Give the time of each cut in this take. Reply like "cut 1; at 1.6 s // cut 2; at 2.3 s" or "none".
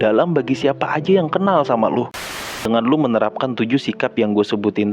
cut 1; at 2.3 s